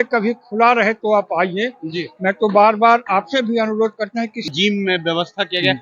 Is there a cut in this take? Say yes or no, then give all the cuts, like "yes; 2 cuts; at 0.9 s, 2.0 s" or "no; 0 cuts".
yes; 1 cut; at 4.5 s